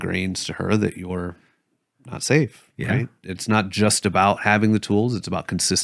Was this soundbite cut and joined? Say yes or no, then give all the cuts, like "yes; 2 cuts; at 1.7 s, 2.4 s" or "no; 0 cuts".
yes; 1 cut; at 3.2 s